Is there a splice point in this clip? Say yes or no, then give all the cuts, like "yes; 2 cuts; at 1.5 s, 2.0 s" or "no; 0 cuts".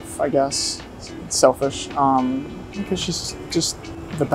no; 0 cuts